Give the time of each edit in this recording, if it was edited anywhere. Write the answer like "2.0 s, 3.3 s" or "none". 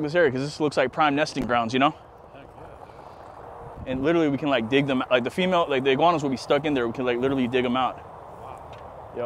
none